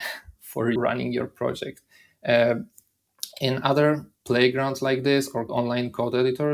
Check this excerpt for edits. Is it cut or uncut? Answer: cut